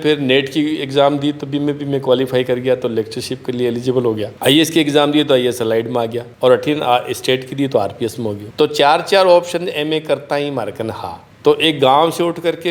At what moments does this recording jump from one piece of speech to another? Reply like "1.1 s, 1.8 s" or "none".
none